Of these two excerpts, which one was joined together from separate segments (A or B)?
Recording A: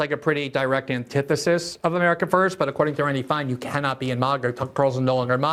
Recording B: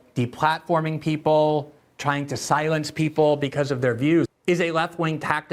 B